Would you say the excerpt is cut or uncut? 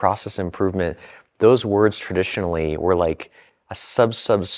uncut